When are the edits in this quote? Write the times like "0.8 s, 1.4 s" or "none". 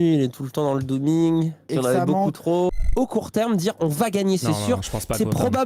1.7 s, 2.8 s